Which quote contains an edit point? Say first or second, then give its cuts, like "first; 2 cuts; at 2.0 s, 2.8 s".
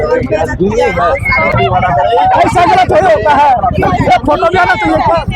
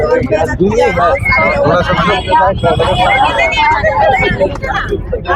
first; 1 cut; at 1.5 s